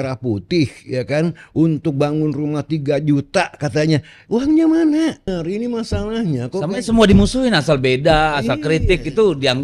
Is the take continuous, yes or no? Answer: no